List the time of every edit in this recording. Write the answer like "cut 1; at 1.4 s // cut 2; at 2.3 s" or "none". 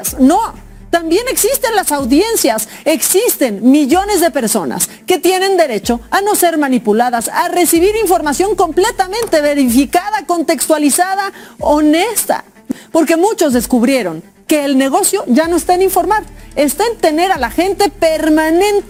none